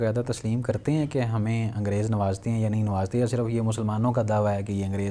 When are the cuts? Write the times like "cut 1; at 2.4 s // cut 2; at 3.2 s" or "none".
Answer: none